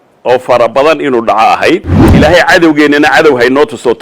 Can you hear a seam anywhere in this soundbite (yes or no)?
yes